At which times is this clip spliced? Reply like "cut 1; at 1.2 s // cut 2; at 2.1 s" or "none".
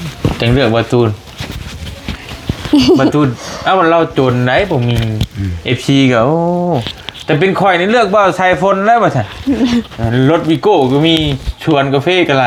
none